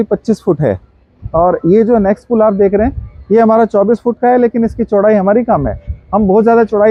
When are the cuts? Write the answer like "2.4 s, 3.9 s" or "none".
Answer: none